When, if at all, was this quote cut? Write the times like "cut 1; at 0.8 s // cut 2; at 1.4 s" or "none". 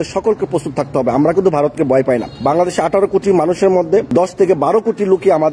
cut 1; at 2.3 s // cut 2; at 4.1 s